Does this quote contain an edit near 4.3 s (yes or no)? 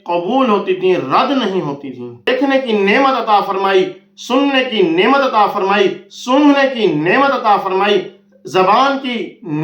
no